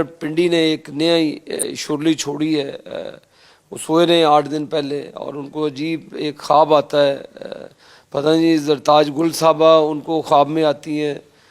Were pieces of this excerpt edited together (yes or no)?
yes